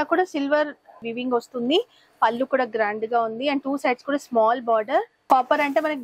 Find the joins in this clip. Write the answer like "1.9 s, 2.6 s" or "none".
1.0 s, 5.1 s